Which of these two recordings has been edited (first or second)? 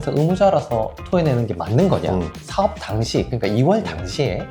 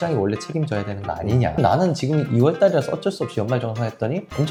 first